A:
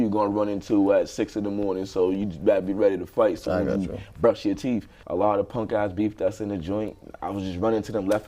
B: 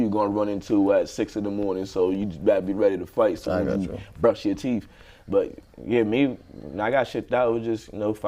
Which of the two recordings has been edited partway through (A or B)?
A